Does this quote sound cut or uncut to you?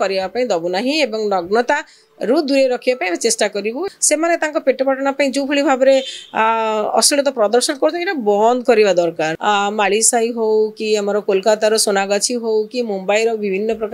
cut